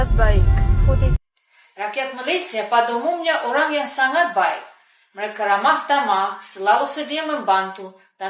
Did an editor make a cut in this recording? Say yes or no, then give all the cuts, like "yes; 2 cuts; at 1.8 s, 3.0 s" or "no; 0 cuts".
yes; 1 cut; at 1.2 s